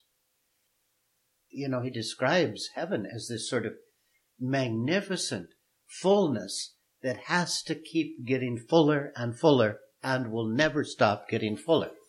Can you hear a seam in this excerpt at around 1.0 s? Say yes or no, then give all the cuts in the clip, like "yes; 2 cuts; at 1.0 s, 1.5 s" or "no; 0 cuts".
yes; 1 cut; at 1.0 s